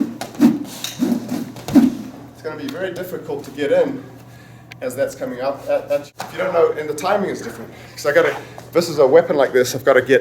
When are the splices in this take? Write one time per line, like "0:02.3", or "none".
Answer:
0:06.2

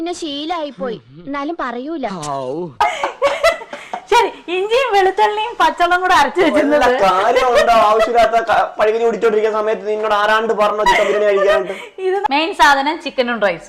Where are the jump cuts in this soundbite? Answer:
0:12.2

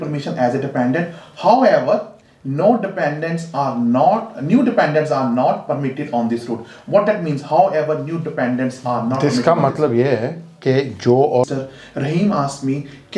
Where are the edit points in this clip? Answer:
0:11.5

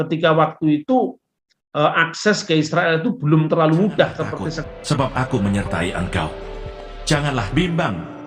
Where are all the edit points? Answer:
0:04.7

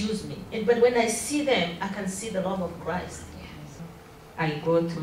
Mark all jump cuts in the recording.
0:03.9

